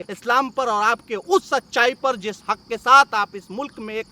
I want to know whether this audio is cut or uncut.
uncut